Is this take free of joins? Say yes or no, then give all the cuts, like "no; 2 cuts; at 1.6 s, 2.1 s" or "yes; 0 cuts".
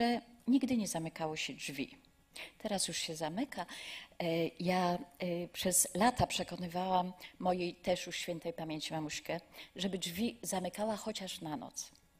no; 1 cut; at 4.4 s